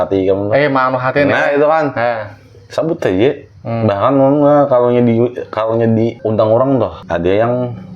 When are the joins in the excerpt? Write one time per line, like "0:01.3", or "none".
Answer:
0:06.2
0:07.0